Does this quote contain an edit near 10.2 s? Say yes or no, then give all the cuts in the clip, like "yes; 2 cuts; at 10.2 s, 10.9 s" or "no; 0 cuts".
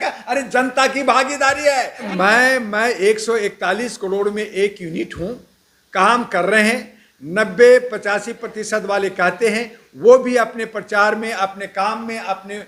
no; 1 cut; at 2.1 s